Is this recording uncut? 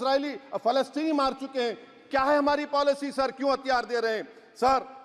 yes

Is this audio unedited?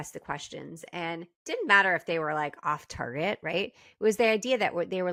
yes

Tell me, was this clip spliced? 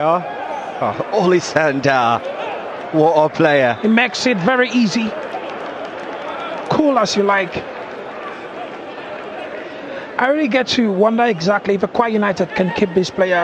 no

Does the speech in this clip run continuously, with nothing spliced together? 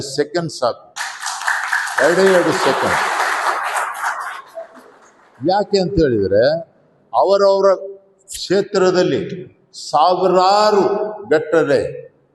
yes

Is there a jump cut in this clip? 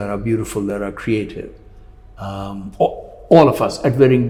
no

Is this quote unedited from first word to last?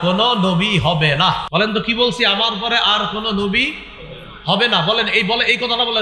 no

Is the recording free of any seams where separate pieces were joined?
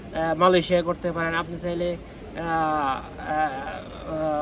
yes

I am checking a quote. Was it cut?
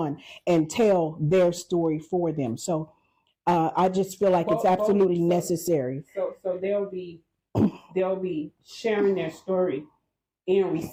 no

